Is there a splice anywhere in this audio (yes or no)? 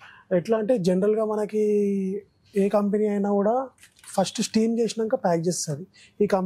no